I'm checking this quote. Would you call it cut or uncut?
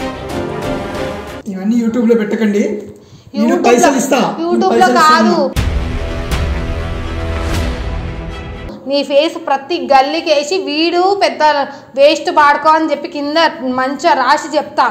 cut